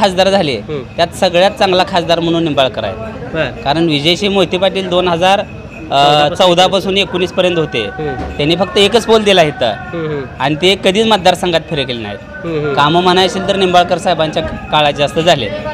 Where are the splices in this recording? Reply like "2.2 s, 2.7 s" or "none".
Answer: none